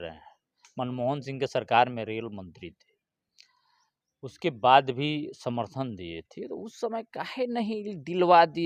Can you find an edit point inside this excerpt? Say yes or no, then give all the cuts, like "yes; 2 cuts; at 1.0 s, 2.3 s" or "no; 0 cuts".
no; 0 cuts